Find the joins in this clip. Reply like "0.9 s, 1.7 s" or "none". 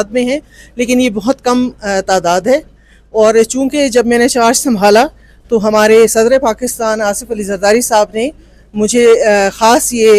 none